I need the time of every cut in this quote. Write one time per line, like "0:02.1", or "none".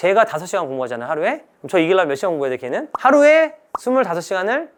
none